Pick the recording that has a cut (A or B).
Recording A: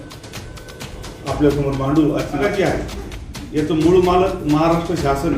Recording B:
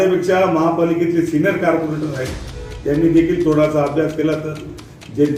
A